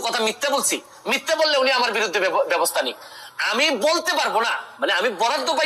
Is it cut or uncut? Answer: uncut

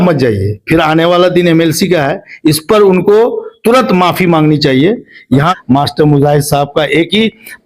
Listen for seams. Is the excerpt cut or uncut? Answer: cut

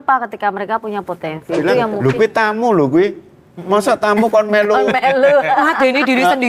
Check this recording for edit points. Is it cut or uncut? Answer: cut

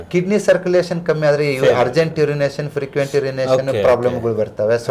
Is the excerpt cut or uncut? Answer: uncut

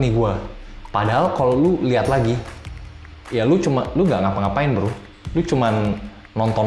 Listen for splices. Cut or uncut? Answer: uncut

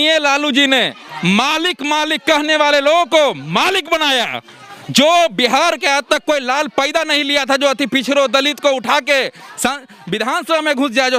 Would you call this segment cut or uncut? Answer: uncut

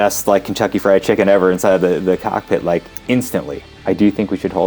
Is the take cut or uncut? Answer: cut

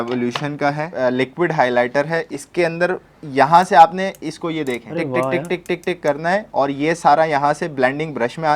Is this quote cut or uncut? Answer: cut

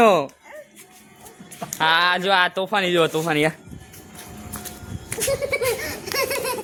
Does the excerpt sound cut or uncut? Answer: uncut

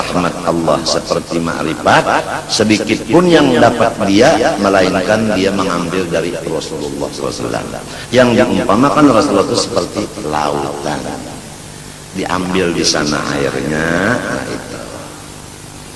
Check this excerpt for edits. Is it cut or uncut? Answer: uncut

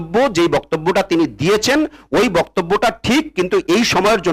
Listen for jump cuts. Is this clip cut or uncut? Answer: uncut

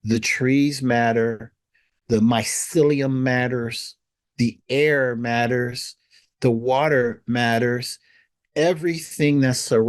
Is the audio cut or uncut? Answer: uncut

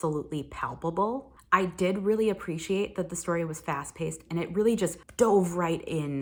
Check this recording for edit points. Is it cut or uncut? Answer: uncut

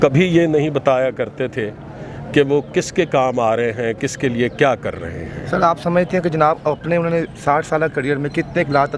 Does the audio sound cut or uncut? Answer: uncut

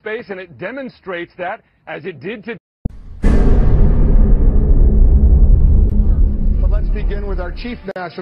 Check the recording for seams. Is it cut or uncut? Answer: uncut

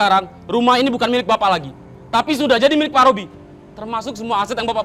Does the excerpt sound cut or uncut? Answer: uncut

